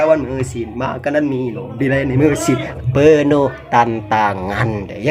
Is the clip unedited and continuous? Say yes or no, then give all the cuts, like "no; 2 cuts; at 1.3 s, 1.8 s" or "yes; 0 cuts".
no; 1 cut; at 2.8 s